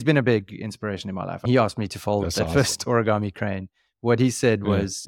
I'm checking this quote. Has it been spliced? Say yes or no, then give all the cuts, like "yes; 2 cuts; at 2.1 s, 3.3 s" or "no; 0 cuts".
no; 0 cuts